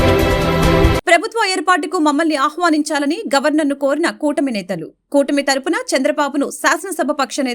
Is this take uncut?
yes; 0 cuts

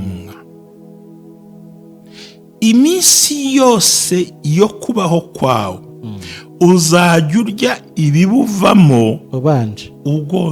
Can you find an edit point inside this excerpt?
no; 0 cuts

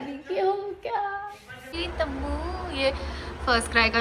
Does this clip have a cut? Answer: yes; 1 cut; at 1.7 s

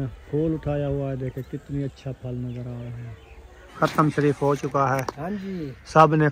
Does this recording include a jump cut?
yes; 1 cut; at 3.6 s

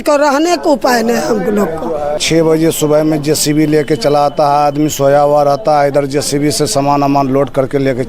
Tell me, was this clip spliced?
yes; 1 cut; at 2.2 s

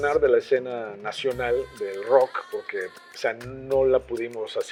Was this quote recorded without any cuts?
yes; 0 cuts

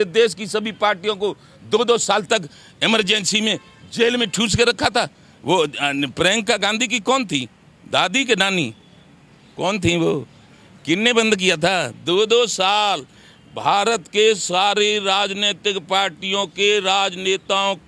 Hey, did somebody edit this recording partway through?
no; 0 cuts

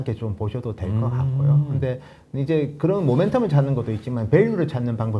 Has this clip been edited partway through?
no; 0 cuts

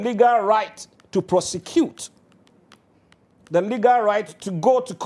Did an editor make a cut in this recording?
no; 0 cuts

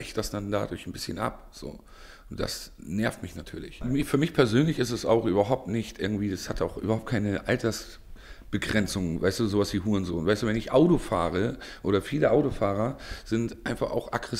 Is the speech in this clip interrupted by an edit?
yes; 1 cut; at 3.8 s

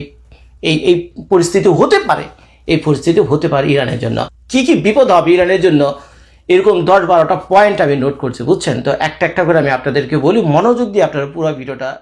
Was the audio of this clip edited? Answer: yes; 1 cut; at 4.3 s

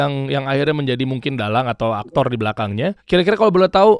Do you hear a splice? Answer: yes; 1 cut; at 3.0 s

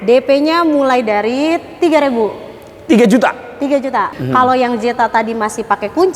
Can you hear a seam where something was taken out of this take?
yes; 1 cut; at 4.1 s

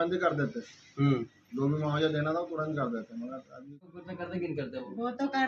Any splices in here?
yes; 1 cut; at 4.0 s

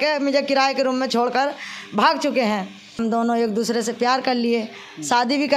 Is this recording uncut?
no; 1 cut; at 3.0 s

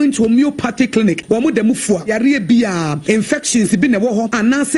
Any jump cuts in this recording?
yes; 1 cut; at 1.1 s

